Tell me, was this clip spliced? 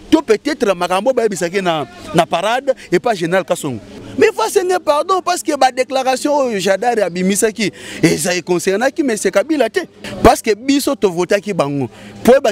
yes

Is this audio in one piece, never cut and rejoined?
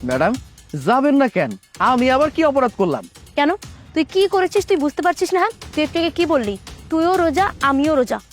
yes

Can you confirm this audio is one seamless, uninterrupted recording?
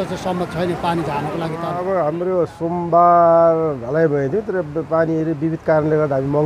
no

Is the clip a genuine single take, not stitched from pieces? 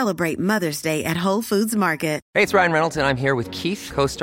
no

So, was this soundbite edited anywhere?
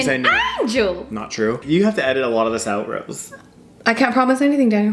yes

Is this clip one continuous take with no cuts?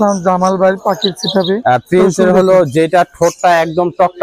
no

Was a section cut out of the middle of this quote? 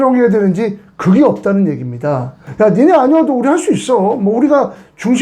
yes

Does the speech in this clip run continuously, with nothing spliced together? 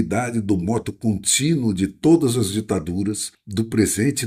no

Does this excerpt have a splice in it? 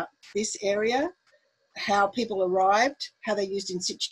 no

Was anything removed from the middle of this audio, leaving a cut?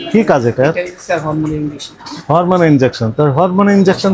no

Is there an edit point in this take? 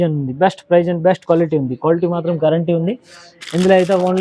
no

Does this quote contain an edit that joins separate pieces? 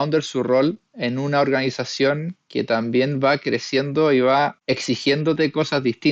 yes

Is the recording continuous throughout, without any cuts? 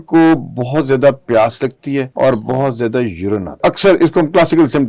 no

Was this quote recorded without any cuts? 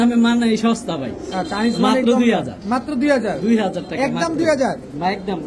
yes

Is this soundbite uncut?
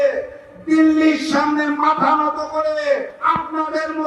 no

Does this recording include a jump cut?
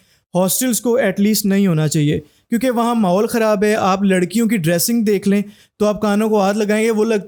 no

